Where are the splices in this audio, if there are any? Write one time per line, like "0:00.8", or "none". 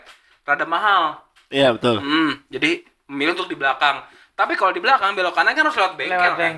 none